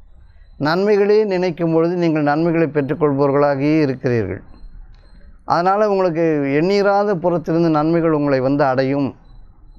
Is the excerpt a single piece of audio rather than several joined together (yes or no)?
yes